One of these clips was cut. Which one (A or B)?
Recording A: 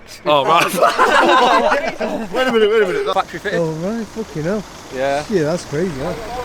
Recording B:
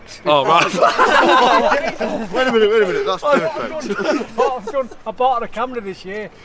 A